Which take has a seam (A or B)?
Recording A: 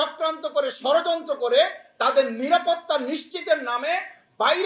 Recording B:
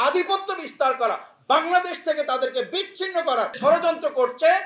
B